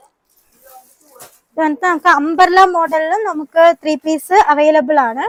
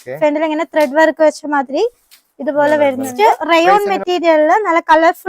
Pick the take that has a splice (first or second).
second